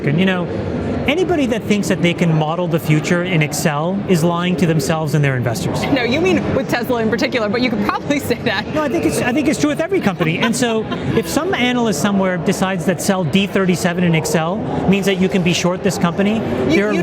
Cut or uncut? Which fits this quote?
uncut